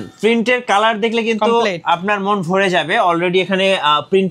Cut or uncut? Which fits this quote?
uncut